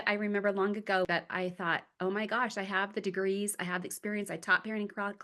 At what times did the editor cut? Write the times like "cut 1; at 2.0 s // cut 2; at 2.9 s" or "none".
cut 1; at 1.1 s

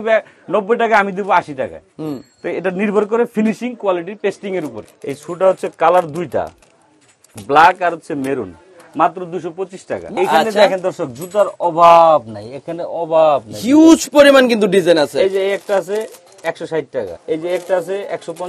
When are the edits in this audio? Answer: cut 1; at 4.8 s // cut 2; at 10.2 s // cut 3; at 17.1 s

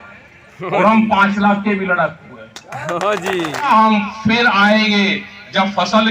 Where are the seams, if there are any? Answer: cut 1; at 3.7 s

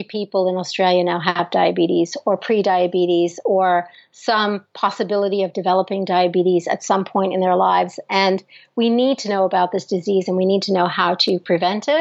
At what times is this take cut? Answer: none

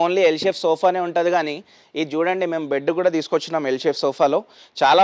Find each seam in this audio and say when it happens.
none

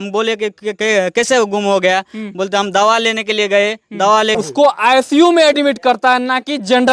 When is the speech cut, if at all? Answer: cut 1; at 4.4 s

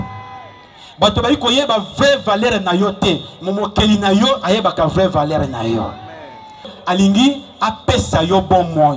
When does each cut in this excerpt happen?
cut 1; at 6.7 s

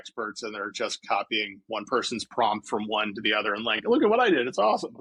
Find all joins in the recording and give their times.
none

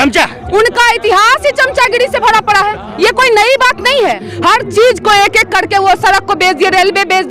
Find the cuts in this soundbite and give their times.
cut 1; at 4.3 s

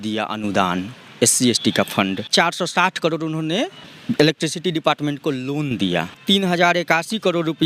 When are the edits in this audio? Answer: cut 1; at 2.3 s // cut 2; at 3.9 s // cut 3; at 6.2 s

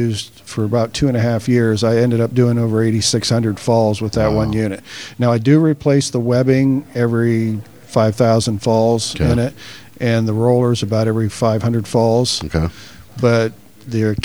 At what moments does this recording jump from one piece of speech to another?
none

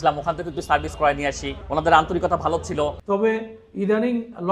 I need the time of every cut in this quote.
cut 1; at 3.0 s

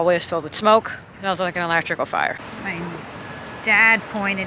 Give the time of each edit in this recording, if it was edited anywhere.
cut 1; at 1.0 s // cut 2; at 2.4 s

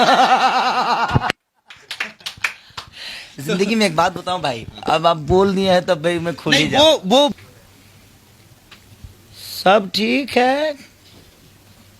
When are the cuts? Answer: cut 1; at 7.4 s

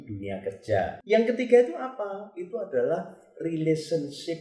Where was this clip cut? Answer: cut 1; at 1.0 s

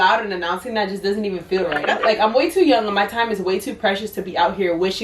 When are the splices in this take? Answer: cut 1; at 2.0 s

